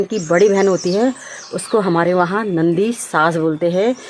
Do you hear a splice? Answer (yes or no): no